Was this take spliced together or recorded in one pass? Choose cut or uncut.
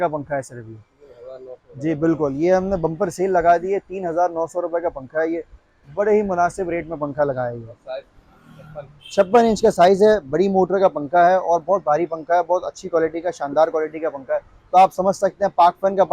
uncut